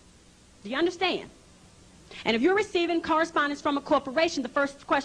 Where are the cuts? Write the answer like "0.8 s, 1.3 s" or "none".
1.8 s